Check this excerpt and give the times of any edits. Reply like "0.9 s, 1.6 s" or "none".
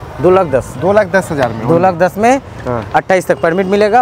none